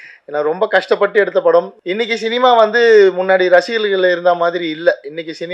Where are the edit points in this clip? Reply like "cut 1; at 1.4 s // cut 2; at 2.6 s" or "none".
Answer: cut 1; at 1.8 s